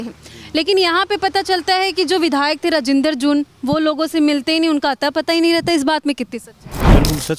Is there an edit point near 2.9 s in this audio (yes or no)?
no